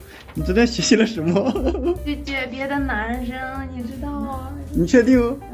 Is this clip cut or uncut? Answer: cut